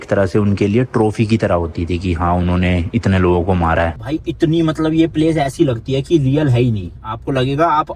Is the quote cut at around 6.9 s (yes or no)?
no